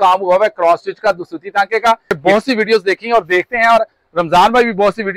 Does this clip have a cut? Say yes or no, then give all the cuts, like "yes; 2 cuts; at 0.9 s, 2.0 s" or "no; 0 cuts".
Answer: yes; 1 cut; at 2.2 s